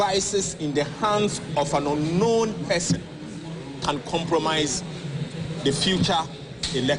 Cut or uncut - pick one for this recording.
uncut